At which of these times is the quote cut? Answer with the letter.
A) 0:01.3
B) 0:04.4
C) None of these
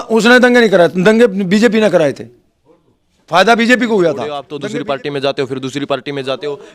B